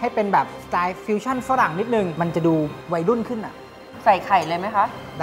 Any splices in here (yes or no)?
yes